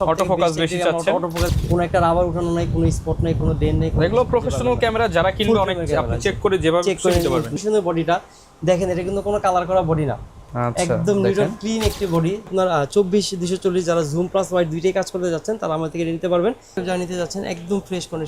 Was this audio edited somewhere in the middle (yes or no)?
yes